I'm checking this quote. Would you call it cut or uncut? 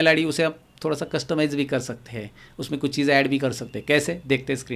uncut